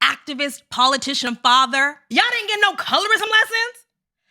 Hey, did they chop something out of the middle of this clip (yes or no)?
yes